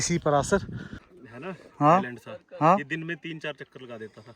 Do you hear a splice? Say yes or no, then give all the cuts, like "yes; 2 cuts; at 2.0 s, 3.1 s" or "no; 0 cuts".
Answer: yes; 1 cut; at 1.1 s